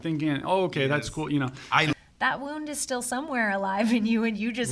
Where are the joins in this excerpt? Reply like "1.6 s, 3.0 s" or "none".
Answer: 1.9 s